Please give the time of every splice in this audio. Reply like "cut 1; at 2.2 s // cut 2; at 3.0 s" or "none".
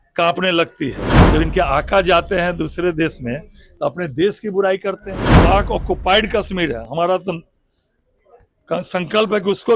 cut 1; at 1.1 s // cut 2; at 5.3 s